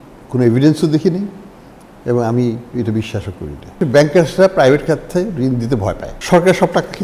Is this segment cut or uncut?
cut